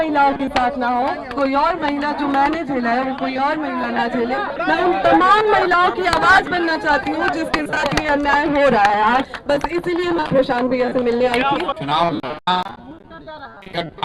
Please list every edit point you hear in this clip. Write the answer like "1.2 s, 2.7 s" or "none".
4.6 s, 9.3 s, 11.8 s